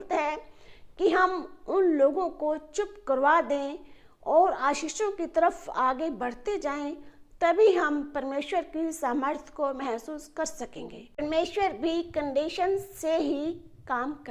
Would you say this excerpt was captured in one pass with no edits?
no; 1 cut; at 11.2 s

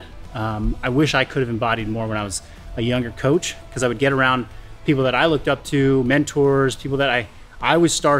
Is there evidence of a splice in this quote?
no; 0 cuts

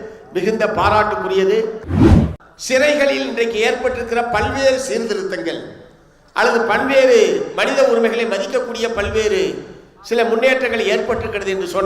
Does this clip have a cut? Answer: yes; 1 cut; at 2.0 s

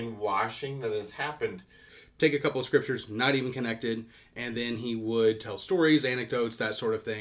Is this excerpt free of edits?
no; 1 cut; at 2.0 s

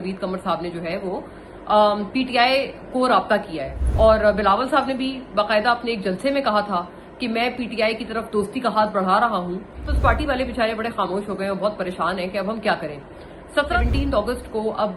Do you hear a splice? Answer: yes; 3 cuts; at 3.7 s, 9.9 s, 13.7 s

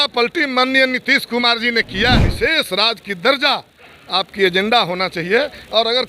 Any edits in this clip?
yes; 1 cut; at 2.3 s

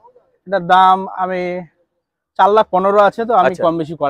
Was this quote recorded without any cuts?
yes; 0 cuts

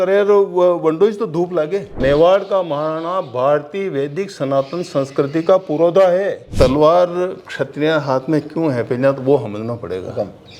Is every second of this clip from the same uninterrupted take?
no; 2 cuts; at 2.0 s, 6.4 s

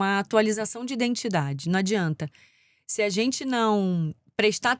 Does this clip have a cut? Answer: no; 0 cuts

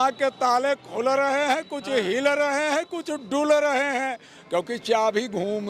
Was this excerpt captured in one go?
yes; 0 cuts

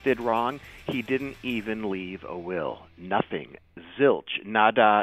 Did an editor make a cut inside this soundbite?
no; 0 cuts

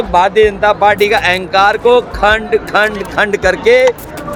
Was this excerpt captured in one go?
yes; 0 cuts

